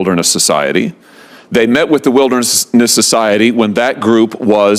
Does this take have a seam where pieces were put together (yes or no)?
no